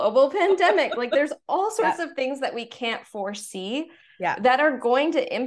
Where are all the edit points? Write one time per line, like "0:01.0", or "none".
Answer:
none